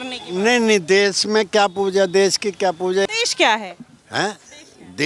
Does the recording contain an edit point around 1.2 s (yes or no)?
no